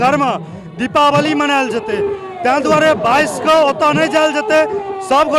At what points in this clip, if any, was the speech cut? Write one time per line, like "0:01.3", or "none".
none